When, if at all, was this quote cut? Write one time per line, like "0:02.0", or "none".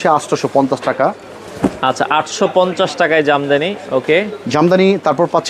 none

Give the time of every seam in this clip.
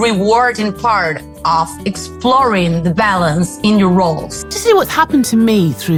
none

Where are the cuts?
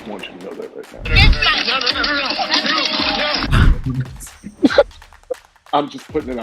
0:03.5

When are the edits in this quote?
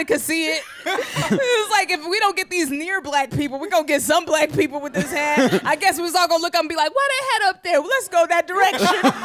none

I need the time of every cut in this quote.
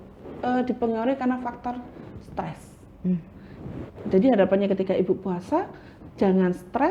none

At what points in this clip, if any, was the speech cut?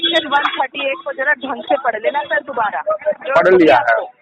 none

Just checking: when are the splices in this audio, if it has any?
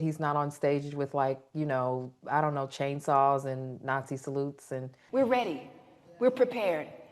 0:05.0

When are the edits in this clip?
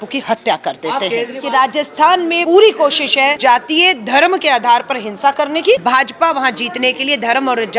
0:01.4
0:02.4
0:03.4
0:05.8

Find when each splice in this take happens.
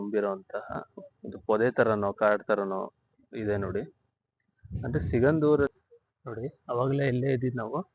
0:05.7

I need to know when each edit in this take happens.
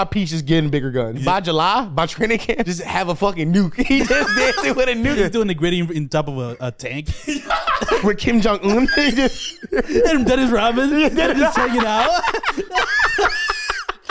0:01.2
0:02.6
0:05.2
0:08.0

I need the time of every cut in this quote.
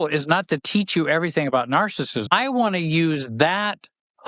0:02.2

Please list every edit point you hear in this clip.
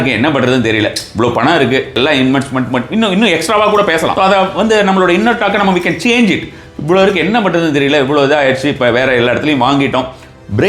0:02.0
0:04.1

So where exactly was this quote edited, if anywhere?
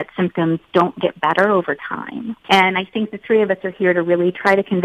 0:02.3

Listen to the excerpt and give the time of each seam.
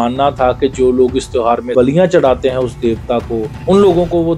none

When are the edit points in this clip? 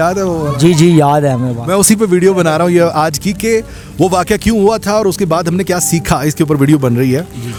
none

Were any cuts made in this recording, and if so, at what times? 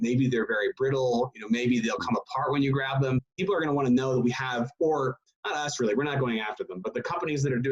0:03.2

